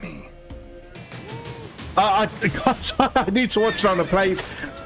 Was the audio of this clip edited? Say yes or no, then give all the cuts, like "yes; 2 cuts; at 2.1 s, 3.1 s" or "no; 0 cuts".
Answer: yes; 1 cut; at 1.0 s